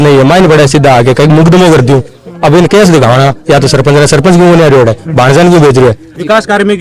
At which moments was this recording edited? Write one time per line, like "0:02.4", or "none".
none

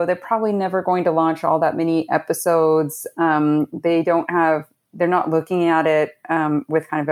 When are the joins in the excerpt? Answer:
none

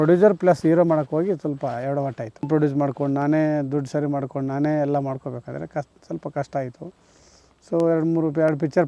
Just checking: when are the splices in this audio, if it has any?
0:02.5

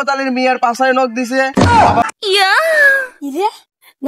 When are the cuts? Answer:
0:02.0

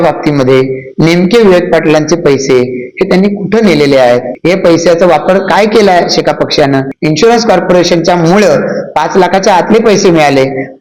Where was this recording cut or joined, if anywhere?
0:04.3
0:06.9

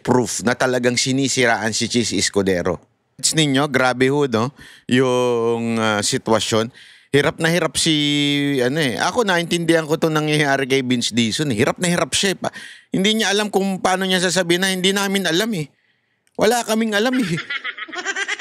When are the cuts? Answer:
0:03.3

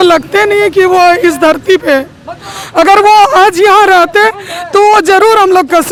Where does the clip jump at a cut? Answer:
none

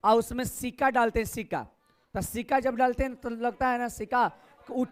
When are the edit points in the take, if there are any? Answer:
none

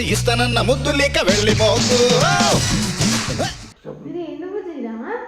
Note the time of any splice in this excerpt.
0:03.7

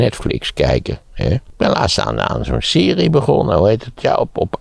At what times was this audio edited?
0:01.5

